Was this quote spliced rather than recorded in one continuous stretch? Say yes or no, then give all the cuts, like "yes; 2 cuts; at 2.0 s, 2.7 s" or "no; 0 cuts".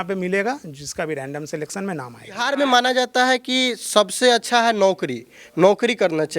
yes; 1 cut; at 2.4 s